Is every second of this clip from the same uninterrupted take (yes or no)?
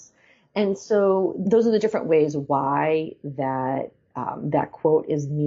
no